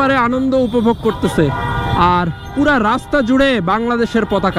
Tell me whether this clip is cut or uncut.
uncut